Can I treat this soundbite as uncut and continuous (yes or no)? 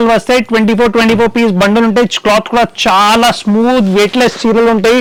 yes